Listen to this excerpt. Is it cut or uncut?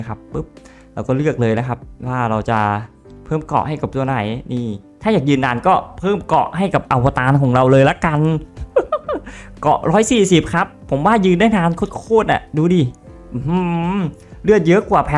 uncut